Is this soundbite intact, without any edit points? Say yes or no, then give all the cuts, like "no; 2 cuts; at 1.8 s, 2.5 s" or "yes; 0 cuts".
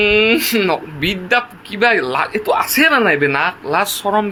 yes; 0 cuts